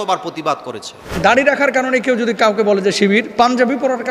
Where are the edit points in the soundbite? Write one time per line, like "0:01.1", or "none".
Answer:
0:01.2
0:03.3